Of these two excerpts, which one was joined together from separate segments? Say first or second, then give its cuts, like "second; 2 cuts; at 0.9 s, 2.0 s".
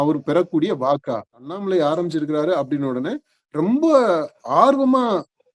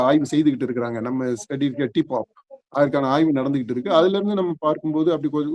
first; 1 cut; at 1.6 s